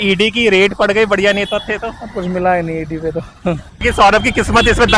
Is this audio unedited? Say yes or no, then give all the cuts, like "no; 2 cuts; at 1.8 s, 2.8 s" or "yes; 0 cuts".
no; 1 cut; at 3.7 s